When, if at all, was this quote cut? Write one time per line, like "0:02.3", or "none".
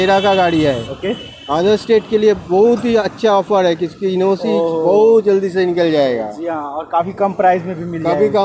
none